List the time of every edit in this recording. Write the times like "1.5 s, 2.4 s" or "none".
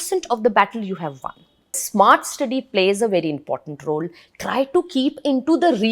1.8 s